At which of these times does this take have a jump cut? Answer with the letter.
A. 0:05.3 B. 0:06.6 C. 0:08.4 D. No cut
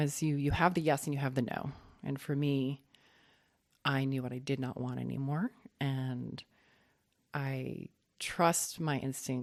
D